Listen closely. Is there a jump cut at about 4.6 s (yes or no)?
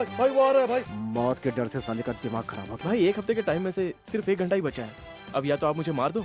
no